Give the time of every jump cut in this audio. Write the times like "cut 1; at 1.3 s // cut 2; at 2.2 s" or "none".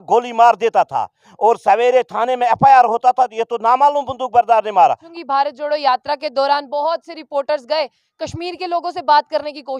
cut 1; at 5.1 s